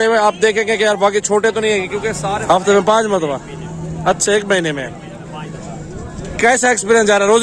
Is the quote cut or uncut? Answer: cut